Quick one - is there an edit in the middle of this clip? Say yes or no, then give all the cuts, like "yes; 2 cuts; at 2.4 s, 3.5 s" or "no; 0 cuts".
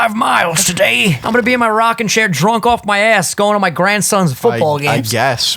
yes; 1 cut; at 1.2 s